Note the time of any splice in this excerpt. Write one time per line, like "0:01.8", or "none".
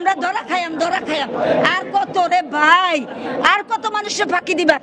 none

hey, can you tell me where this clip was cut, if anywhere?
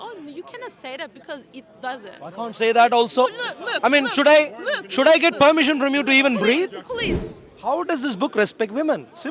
0:07.2

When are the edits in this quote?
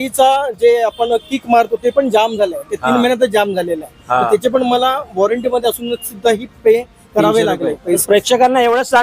0:08.0

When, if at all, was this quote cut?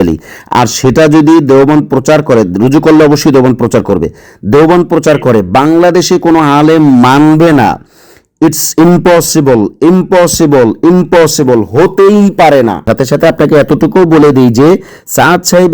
0:12.8

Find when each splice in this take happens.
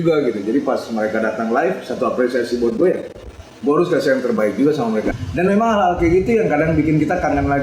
0:05.1

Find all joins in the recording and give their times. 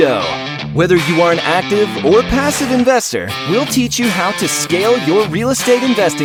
none

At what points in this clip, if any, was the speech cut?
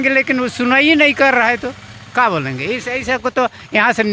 none

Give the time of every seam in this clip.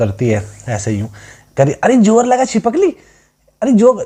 none

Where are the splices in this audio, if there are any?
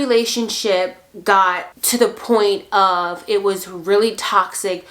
0:01.7

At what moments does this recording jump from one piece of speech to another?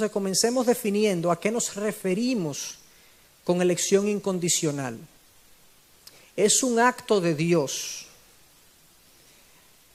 none

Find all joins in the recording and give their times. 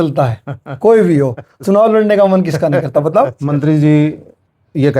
0:03.4

